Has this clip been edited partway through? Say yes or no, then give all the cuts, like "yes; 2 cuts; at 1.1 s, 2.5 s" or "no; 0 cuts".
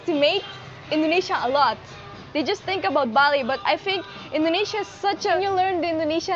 yes; 1 cut; at 5.4 s